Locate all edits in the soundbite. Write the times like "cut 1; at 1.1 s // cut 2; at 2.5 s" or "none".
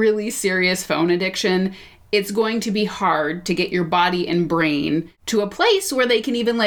cut 1; at 5.2 s